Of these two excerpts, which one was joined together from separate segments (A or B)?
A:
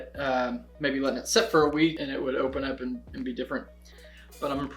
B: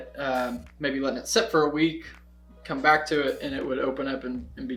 A